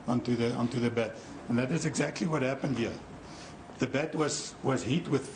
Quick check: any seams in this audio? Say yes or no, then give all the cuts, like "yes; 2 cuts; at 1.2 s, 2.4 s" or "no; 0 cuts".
yes; 1 cut; at 2.6 s